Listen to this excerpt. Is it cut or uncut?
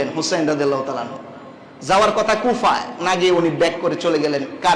uncut